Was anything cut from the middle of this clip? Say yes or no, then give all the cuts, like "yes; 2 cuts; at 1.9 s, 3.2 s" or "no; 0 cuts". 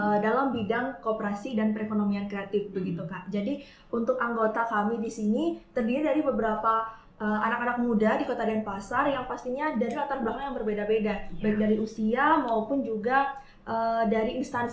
no; 0 cuts